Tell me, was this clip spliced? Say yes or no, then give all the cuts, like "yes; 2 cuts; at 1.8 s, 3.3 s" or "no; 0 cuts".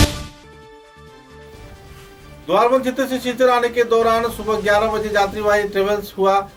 no; 0 cuts